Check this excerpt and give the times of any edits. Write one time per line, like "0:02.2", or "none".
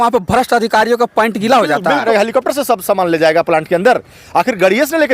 0:02.1